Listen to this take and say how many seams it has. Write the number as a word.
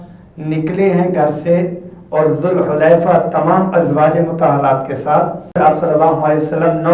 one